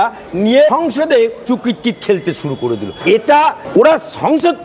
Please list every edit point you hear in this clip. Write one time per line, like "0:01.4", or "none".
0:01.0
0:02.9
0:03.6